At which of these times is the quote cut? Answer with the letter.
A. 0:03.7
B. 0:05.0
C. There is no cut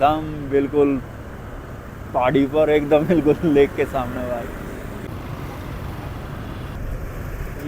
B